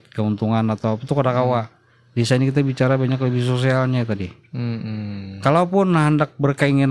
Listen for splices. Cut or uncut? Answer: uncut